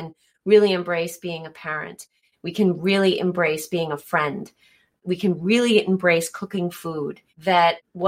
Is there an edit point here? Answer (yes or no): no